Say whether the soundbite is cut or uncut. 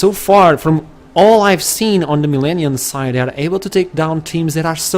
cut